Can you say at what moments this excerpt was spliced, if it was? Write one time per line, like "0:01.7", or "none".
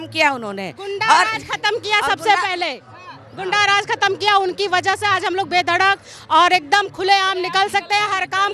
none